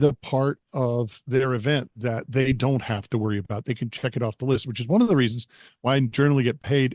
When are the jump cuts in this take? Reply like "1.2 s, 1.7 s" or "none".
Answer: 1.2 s